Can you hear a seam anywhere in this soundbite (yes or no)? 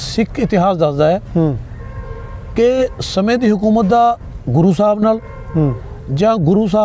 no